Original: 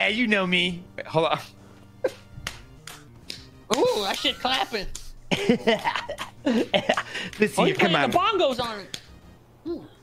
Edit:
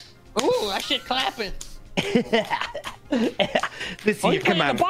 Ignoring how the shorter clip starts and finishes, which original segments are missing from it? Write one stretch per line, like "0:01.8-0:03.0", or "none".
none